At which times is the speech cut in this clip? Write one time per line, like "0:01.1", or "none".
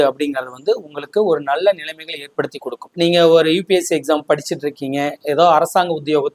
0:02.9

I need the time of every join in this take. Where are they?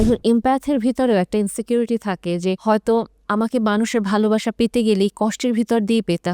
0:02.6

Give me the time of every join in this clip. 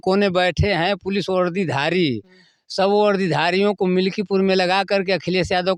none

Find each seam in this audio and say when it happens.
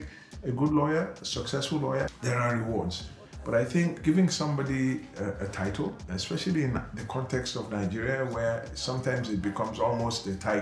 0:02.2
0:04.0
0:06.1

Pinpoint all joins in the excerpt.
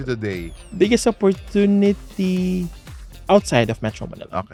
none

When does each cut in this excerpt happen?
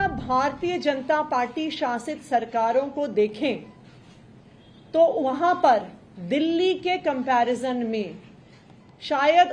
none

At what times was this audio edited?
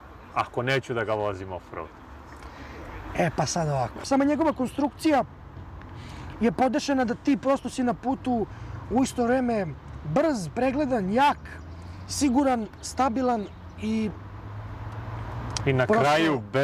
0:04.0

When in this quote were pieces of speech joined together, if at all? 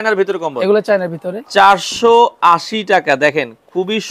0:01.3

